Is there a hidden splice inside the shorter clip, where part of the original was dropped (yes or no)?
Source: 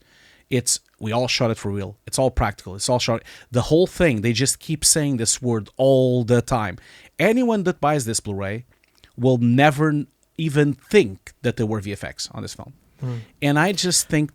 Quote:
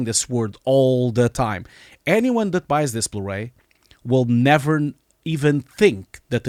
no